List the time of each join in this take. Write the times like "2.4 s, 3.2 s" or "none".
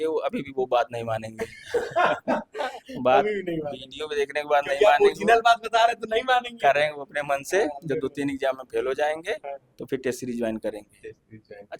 none

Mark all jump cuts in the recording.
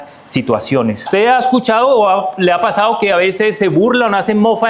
1.0 s

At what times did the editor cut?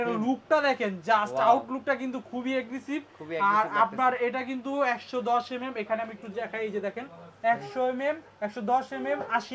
none

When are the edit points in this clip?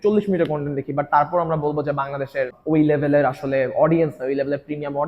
2.6 s

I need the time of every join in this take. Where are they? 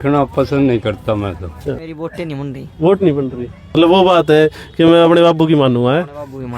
1.4 s, 3.8 s

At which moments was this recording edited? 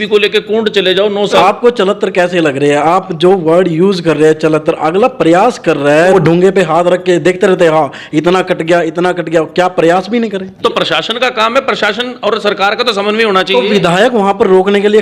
1.4 s, 6.1 s, 10.5 s

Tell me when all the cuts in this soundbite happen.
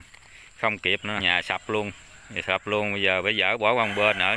1.2 s

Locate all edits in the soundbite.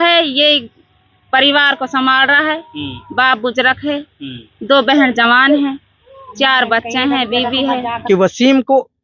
7.9 s

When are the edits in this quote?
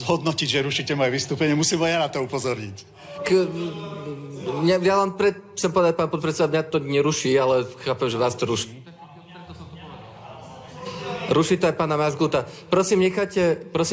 none

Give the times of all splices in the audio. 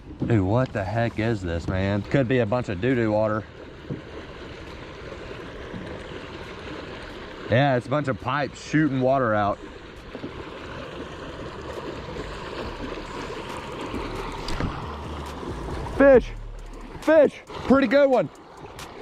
2.0 s

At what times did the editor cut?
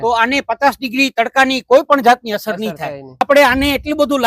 3.2 s

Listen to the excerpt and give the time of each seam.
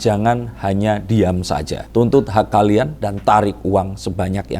1.8 s, 3.0 s

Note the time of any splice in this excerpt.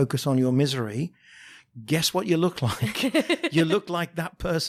none

